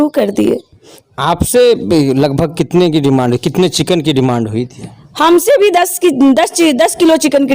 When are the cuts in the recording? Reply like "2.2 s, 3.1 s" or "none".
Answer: 1.3 s

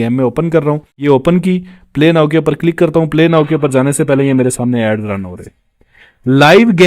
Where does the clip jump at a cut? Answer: 0.9 s

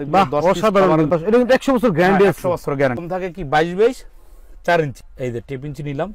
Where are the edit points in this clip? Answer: 1.1 s, 3.0 s

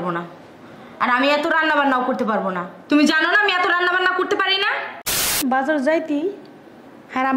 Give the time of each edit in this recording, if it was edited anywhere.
5.4 s

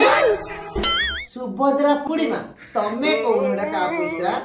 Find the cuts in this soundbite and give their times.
2.0 s

